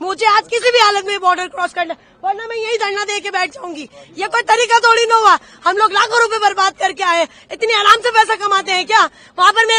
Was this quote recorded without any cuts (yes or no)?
yes